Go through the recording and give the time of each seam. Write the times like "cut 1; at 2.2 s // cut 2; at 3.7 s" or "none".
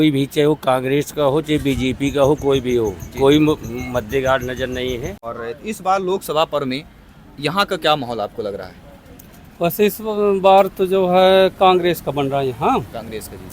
cut 1; at 5.3 s